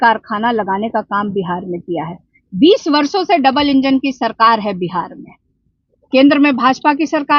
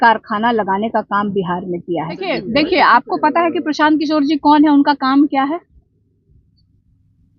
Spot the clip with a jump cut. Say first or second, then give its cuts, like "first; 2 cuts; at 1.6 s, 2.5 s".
second; 1 cut; at 2.4 s